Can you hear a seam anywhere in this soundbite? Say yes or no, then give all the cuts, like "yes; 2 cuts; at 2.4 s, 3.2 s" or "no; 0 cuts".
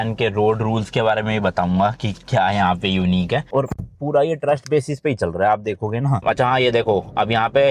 yes; 2 cuts; at 3.5 s, 6.2 s